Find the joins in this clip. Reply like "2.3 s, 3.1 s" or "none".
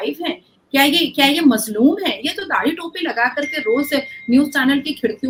none